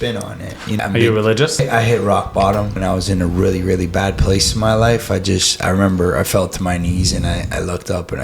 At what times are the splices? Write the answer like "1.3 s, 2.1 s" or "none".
0.8 s, 1.6 s, 2.8 s